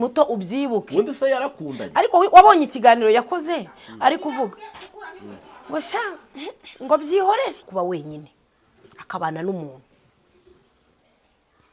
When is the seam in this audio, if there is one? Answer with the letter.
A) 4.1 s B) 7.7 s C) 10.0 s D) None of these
B